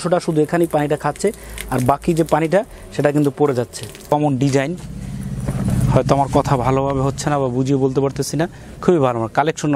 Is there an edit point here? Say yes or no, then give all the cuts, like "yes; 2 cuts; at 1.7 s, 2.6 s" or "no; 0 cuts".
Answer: yes; 1 cut; at 4.1 s